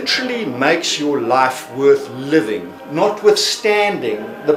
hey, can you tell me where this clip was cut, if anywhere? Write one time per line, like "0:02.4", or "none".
none